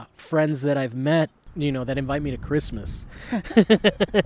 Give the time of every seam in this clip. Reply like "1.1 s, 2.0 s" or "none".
1.4 s